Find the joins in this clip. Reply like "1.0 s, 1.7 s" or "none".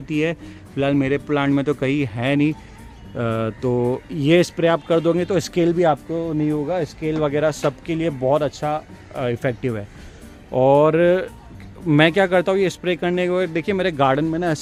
none